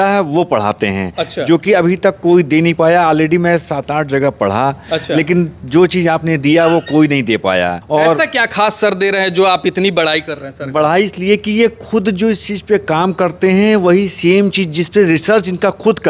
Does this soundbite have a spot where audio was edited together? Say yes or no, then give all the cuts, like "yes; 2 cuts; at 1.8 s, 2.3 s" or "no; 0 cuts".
no; 0 cuts